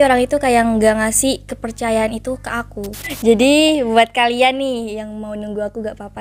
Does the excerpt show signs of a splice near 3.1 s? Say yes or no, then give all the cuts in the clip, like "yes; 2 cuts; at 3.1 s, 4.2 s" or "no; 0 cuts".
yes; 1 cut; at 3.1 s